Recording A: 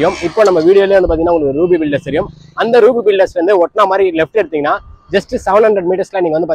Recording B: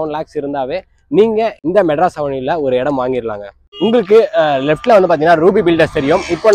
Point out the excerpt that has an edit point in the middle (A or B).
B